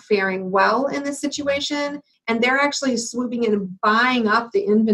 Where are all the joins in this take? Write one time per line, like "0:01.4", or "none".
0:02.1